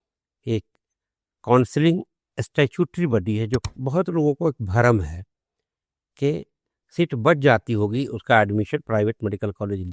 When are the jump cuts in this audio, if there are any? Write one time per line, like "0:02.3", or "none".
0:03.6